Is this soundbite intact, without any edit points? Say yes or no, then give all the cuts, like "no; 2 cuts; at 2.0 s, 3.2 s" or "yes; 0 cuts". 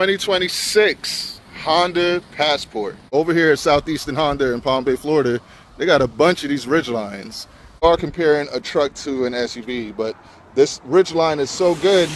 no; 2 cuts; at 3.0 s, 7.8 s